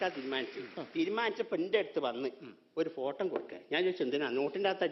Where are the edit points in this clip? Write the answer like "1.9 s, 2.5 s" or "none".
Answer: none